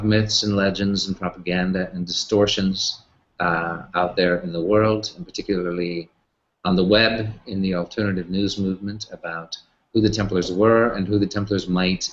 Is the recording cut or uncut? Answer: uncut